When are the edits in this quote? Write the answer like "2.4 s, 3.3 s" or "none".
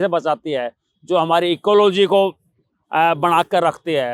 none

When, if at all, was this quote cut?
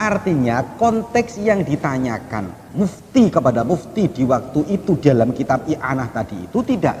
none

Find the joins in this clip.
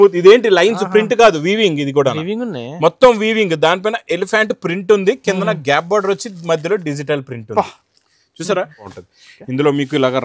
8.9 s

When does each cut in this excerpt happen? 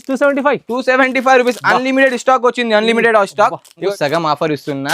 3.8 s

